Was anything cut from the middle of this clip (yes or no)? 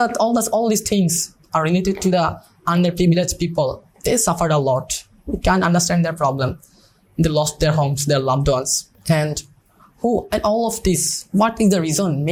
no